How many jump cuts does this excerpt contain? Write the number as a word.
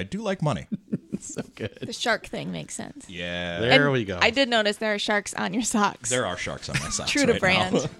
zero